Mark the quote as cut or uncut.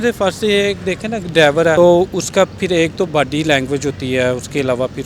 cut